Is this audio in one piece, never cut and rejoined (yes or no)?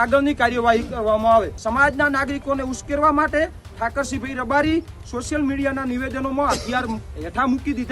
no